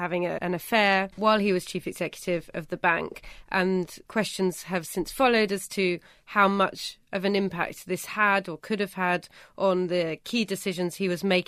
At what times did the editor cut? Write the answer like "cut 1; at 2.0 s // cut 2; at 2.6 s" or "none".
cut 1; at 0.9 s // cut 2; at 4.0 s